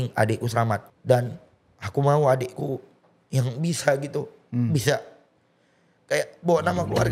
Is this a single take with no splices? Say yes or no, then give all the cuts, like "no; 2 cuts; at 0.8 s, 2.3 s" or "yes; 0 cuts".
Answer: no; 1 cut; at 0.9 s